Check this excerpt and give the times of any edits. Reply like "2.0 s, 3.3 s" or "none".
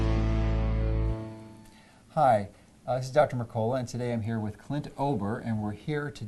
none